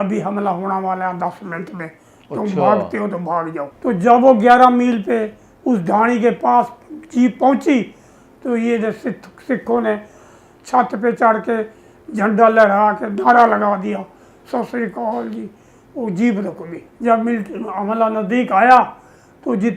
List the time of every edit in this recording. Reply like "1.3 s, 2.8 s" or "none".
3.7 s, 16.9 s